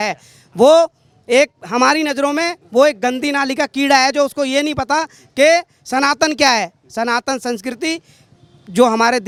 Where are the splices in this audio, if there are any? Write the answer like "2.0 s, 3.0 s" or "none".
none